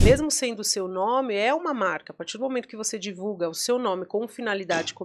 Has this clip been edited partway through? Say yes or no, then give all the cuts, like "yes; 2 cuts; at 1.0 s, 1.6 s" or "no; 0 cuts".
no; 0 cuts